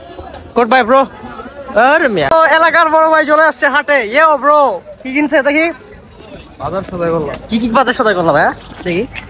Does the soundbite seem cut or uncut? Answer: cut